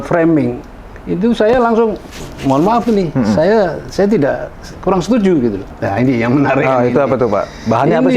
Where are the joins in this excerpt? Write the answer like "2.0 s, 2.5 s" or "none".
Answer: 5.7 s